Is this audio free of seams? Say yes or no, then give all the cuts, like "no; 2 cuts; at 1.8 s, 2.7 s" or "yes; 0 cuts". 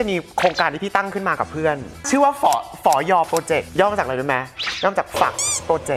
yes; 0 cuts